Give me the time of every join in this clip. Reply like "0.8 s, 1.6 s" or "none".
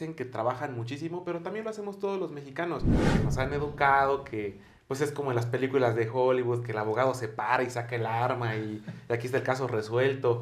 3.1 s